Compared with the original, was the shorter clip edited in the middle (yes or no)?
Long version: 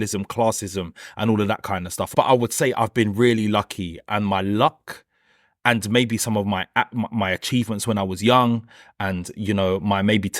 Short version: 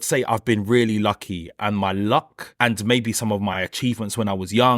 yes